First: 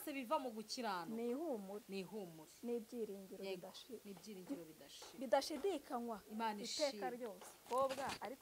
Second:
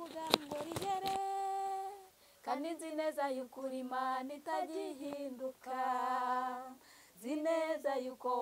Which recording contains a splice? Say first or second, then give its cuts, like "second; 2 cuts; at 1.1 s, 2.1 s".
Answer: first; 1 cut; at 7.5 s